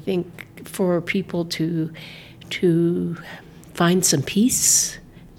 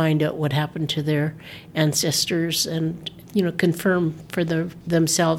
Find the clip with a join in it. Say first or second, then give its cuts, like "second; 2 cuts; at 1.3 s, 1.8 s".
second; 1 cut; at 3.2 s